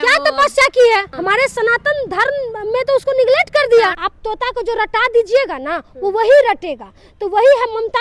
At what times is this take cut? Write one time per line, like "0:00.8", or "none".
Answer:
0:01.1
0:04.0